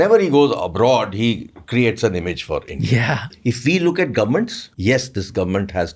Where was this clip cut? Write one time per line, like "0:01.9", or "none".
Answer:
0:03.3
0:04.6